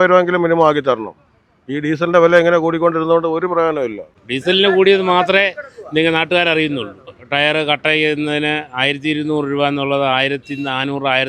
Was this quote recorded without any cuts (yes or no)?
yes